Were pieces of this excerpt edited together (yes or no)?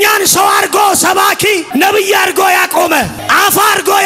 yes